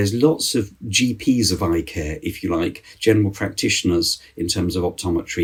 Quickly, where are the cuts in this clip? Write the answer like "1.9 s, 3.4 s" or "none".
none